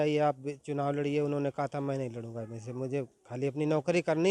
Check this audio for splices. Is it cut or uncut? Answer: uncut